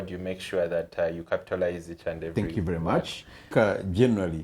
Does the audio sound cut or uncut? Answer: cut